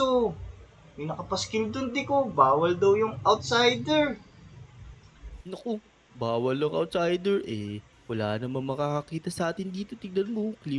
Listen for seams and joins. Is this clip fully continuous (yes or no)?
yes